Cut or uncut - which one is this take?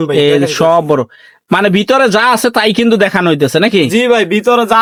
uncut